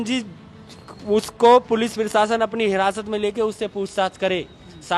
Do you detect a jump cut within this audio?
no; 0 cuts

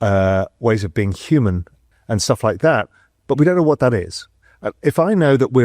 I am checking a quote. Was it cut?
no; 0 cuts

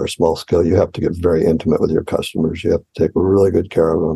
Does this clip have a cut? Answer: no; 0 cuts

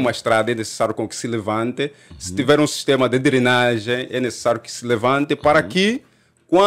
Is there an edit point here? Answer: no; 0 cuts

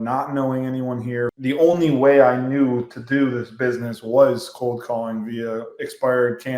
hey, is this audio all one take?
no; 1 cut; at 1.3 s

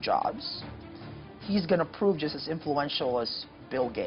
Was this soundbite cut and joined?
no; 0 cuts

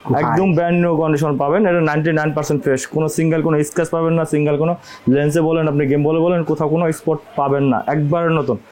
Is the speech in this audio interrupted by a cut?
no; 0 cuts

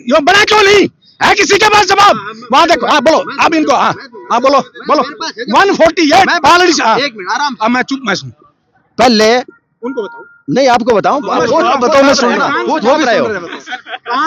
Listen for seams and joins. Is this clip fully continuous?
yes; 0 cuts

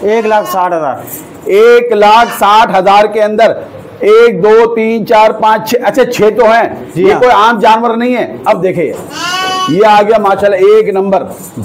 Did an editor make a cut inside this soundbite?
no; 0 cuts

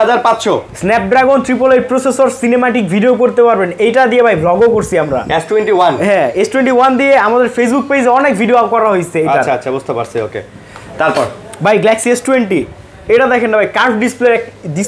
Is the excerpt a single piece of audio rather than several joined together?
yes; 0 cuts

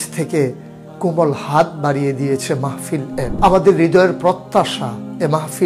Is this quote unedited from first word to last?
no; 1 cut; at 3.2 s

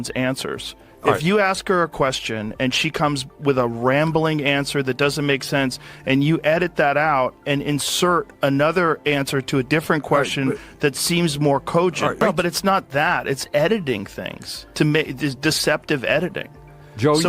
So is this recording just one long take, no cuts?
no; 1 cut; at 12.2 s

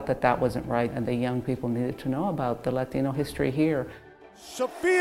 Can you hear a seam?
yes; 2 cuts; at 0.9 s, 4.3 s

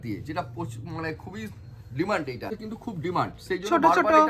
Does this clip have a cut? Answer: yes; 1 cut; at 2.5 s

